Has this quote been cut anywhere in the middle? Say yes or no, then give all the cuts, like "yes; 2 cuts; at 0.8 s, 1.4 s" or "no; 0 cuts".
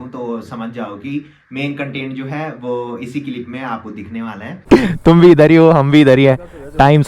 yes; 1 cut; at 4.5 s